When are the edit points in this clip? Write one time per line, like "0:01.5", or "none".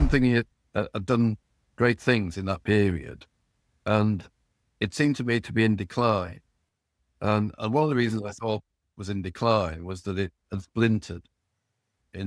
none